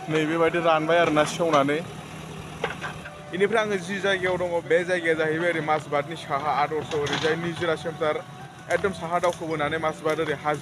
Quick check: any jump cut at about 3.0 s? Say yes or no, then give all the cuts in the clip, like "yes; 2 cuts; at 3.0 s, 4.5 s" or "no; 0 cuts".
yes; 3 cuts; at 3.0 s, 4.6 s, 8.5 s